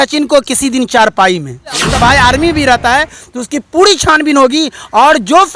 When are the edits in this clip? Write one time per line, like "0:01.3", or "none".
0:01.8